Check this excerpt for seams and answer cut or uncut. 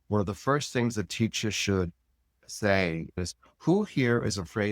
cut